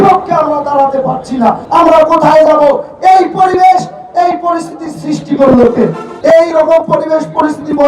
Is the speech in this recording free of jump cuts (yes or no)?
no